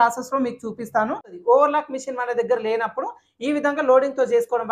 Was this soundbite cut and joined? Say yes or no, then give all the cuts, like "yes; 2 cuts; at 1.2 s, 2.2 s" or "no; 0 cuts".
yes; 1 cut; at 1.3 s